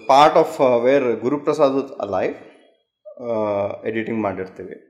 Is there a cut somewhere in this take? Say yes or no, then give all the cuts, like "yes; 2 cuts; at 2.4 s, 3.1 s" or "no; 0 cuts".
no; 0 cuts